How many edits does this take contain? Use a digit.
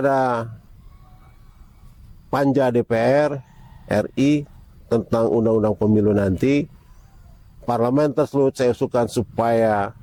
0